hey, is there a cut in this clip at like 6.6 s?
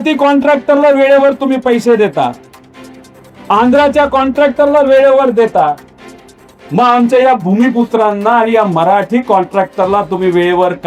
no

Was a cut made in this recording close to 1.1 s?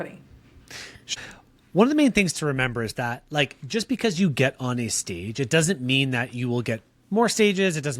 yes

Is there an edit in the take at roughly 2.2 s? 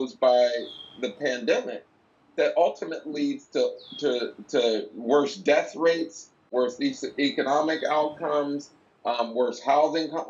no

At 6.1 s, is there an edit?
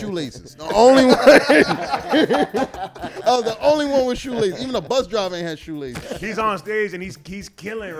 yes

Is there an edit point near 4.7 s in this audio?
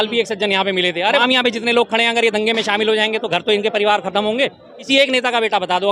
yes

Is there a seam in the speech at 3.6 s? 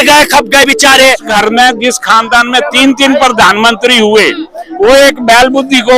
no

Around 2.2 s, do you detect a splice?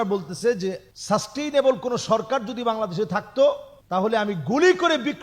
no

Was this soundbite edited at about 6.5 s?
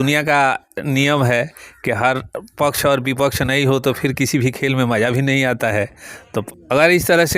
yes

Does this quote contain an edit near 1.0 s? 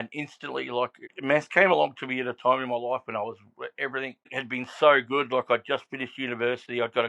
yes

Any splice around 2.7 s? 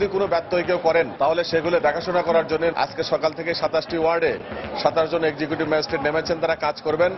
yes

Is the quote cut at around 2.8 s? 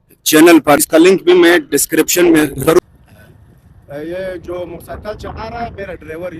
yes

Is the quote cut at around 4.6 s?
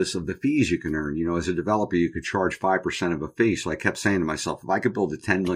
no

